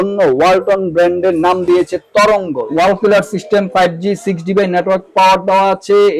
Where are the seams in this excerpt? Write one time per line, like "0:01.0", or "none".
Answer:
0:02.6